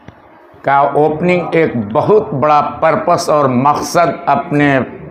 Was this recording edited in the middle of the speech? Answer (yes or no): no